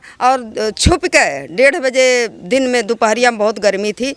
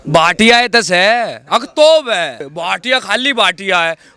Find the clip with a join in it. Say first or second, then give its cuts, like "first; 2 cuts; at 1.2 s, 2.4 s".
second; 1 cut; at 2.5 s